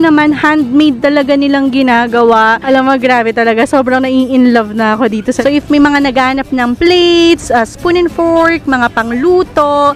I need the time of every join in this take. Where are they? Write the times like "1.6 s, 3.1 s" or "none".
2.6 s, 5.4 s